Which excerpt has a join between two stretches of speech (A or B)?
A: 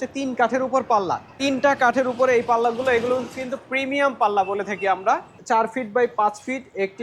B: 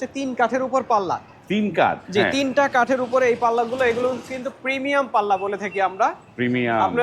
A